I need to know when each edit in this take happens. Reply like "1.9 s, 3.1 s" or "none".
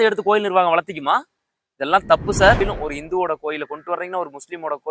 2.6 s